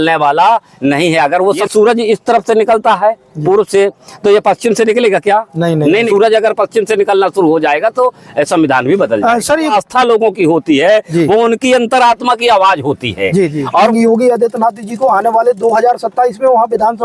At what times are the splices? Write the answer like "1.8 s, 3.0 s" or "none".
1.6 s, 6.1 s, 9.7 s, 13.9 s